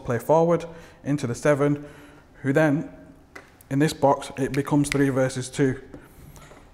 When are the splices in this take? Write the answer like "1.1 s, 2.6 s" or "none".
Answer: none